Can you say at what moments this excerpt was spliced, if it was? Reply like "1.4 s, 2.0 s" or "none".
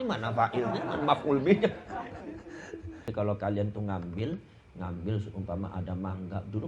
3.1 s